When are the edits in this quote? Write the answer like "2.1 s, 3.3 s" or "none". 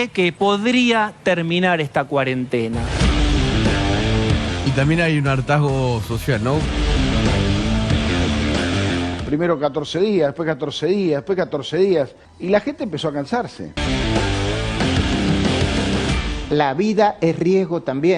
4.6 s, 6.7 s, 9.2 s, 13.7 s, 16.2 s